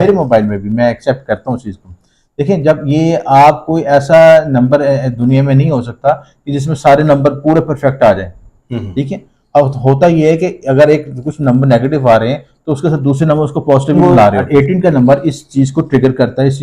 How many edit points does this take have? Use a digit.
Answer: 1